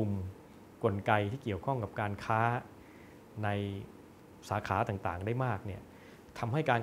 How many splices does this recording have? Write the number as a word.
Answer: zero